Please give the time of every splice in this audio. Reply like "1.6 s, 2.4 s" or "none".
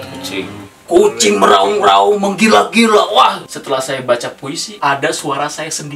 3.5 s, 4.7 s